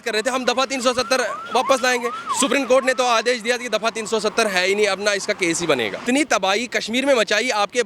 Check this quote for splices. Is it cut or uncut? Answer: cut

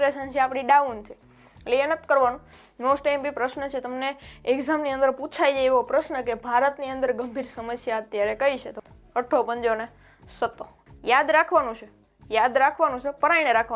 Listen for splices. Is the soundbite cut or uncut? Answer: cut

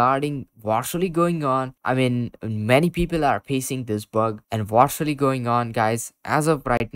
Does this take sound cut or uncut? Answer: uncut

